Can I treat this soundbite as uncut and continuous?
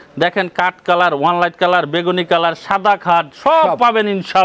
yes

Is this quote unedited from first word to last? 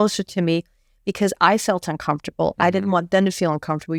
yes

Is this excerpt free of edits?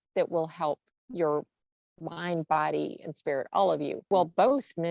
no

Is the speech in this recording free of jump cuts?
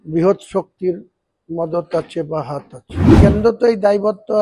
no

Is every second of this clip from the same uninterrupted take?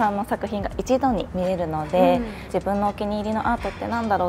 no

